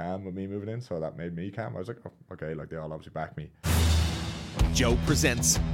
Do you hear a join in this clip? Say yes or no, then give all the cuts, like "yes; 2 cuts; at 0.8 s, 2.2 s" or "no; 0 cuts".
yes; 1 cut; at 3.5 s